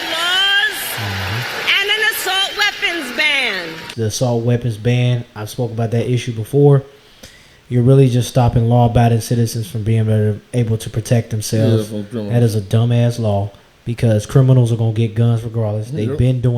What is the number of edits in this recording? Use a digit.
1